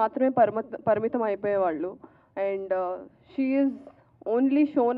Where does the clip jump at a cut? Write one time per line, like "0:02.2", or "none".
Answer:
none